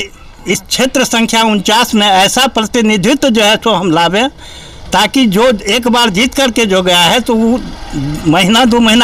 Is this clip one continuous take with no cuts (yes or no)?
yes